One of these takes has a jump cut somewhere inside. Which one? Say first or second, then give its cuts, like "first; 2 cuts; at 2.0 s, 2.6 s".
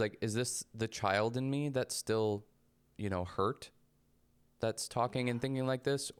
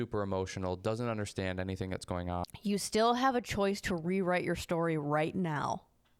second; 1 cut; at 2.4 s